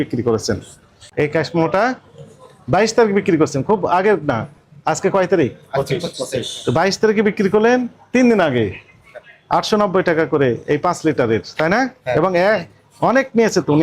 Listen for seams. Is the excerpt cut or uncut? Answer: cut